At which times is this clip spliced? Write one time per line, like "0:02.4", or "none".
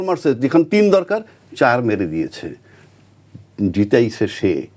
none